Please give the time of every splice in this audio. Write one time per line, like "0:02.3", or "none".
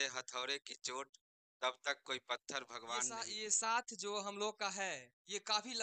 0:03.3